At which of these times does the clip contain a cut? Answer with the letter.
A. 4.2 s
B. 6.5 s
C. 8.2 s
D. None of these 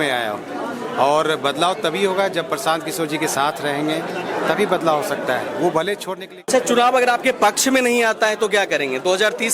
B